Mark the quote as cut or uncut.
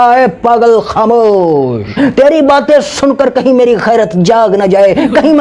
uncut